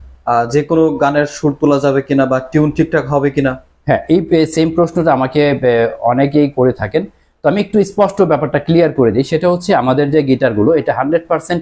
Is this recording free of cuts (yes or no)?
yes